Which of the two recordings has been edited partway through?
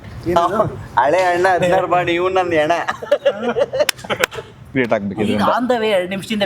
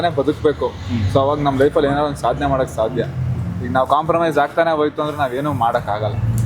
first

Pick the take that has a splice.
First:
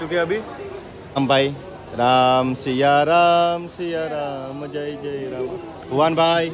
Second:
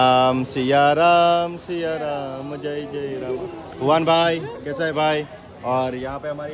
first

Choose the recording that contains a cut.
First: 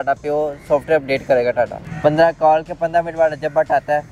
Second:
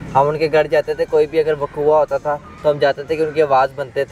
first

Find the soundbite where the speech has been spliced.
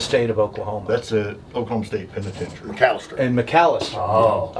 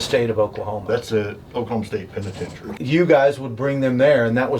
second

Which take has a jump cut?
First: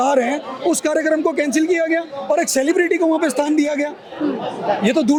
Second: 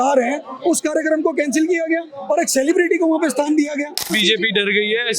second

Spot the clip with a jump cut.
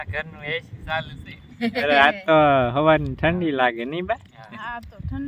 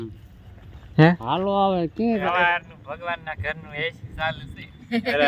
second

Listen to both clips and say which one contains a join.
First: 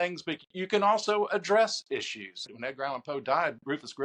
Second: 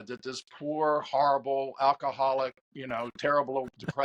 first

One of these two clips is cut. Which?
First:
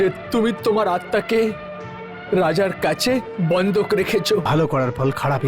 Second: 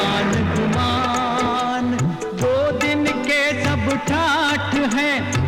first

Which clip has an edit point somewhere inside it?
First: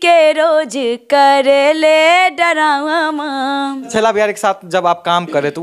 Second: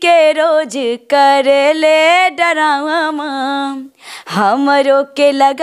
first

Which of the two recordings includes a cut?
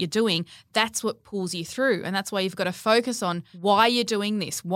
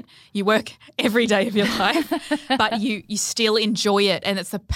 first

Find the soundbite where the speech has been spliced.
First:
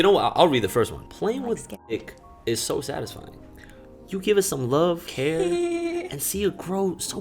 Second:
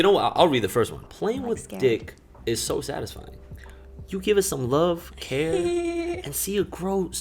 first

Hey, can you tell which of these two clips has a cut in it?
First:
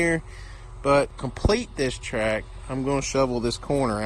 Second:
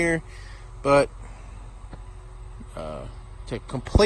first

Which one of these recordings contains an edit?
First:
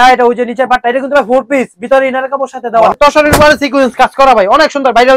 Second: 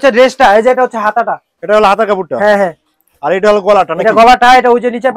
first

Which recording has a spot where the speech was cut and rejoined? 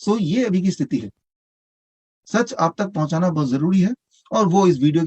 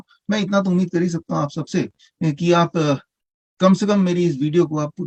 first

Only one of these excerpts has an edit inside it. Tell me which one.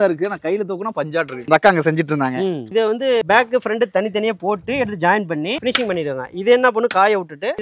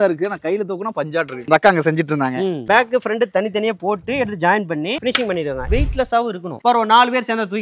second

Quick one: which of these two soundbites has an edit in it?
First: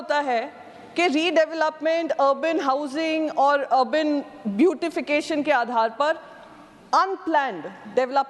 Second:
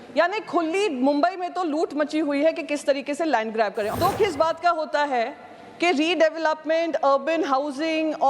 second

